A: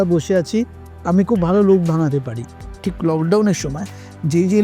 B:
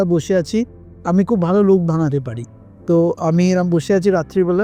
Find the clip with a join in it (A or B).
A